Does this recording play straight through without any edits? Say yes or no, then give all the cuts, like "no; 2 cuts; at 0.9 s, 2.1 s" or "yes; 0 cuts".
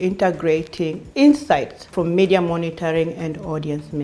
no; 2 cuts; at 1.0 s, 1.9 s